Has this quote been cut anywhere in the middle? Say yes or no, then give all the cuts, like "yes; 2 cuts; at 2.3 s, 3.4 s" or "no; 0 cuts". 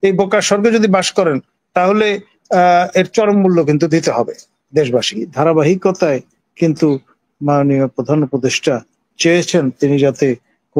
yes; 1 cut; at 5.3 s